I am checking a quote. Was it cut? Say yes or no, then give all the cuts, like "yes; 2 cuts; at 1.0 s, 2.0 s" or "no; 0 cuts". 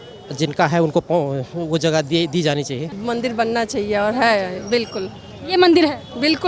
yes; 1 cut; at 2.9 s